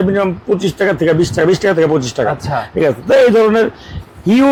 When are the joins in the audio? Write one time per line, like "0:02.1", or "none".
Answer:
none